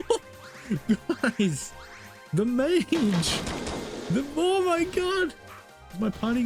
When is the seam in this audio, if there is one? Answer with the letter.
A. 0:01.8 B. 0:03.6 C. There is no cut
C